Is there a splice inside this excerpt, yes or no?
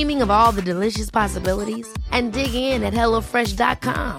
no